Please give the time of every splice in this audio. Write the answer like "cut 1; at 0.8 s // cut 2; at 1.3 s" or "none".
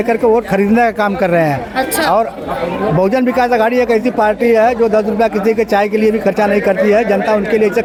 none